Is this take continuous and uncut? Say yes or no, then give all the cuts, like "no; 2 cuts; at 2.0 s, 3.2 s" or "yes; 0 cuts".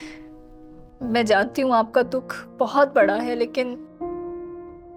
yes; 0 cuts